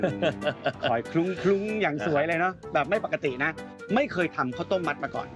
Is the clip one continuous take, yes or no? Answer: no